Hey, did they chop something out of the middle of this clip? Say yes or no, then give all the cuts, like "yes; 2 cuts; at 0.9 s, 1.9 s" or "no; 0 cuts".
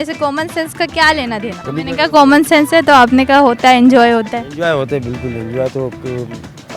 yes; 1 cut; at 1.6 s